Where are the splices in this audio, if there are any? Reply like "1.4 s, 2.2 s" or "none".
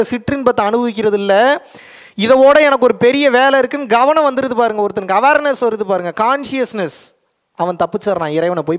none